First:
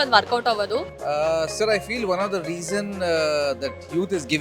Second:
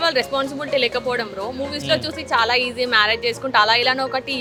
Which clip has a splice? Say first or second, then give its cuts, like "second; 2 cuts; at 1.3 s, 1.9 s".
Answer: first; 1 cut; at 0.9 s